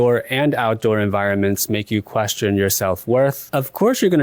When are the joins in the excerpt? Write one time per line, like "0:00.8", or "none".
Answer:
none